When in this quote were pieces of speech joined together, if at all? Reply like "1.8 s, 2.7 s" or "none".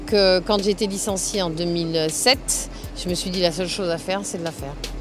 3.6 s

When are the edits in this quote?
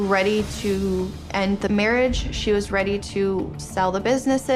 none

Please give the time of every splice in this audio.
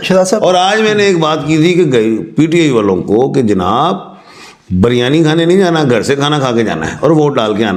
none

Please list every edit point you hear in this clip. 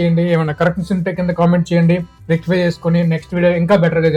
none

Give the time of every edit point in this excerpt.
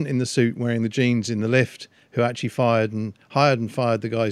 none

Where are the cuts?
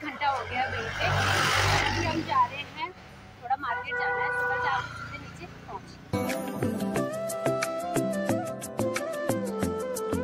none

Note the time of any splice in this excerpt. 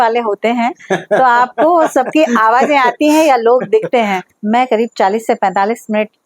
4.2 s

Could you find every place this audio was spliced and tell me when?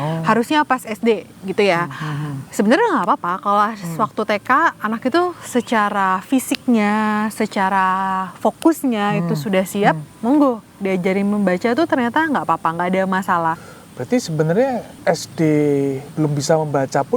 13.7 s, 14.9 s, 16.0 s

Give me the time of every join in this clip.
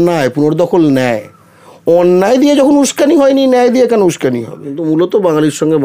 4.7 s

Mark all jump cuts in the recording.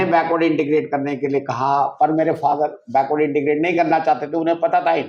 none

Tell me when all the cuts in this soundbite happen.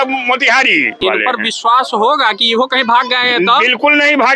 1.0 s

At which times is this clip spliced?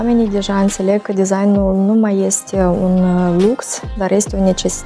none

